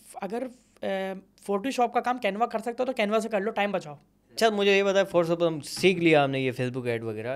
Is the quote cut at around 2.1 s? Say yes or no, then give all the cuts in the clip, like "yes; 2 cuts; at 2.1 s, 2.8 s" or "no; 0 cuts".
no; 1 cut; at 4.2 s